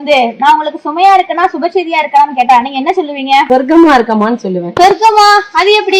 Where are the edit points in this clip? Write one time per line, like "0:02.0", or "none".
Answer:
0:03.5
0:04.6